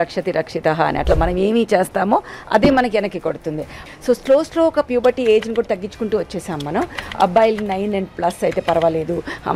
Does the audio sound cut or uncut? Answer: cut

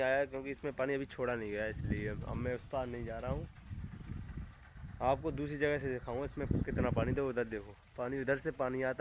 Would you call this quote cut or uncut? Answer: uncut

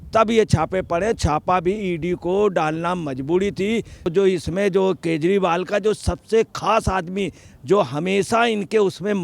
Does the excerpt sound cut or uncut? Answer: cut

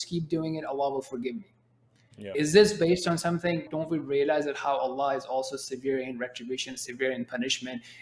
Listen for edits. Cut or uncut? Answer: cut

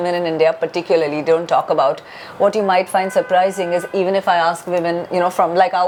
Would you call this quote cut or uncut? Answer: uncut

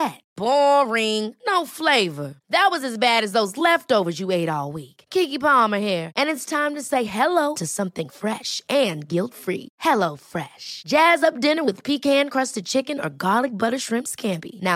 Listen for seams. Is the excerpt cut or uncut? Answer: uncut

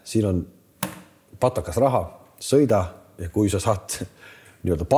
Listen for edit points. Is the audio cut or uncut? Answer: uncut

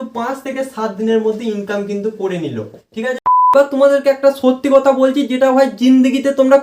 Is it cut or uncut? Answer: cut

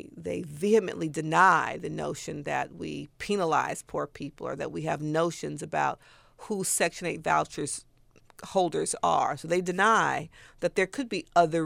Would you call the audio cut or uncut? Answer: uncut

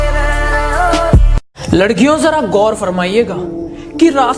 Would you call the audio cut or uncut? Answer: uncut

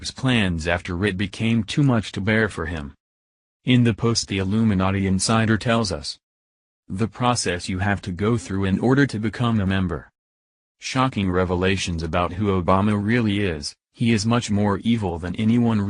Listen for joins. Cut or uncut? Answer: cut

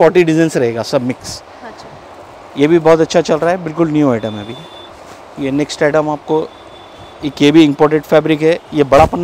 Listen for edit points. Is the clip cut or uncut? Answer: uncut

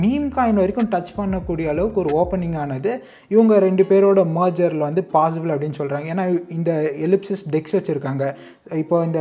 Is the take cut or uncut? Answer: uncut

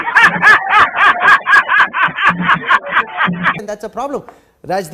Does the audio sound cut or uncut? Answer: uncut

